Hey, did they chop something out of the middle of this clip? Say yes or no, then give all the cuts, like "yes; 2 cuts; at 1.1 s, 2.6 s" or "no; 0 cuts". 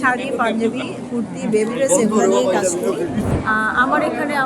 yes; 1 cut; at 3.3 s